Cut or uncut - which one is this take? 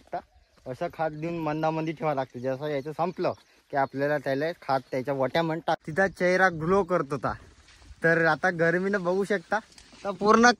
cut